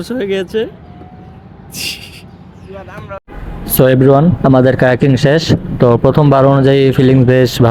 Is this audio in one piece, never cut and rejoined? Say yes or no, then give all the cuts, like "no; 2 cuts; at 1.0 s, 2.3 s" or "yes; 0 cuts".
yes; 0 cuts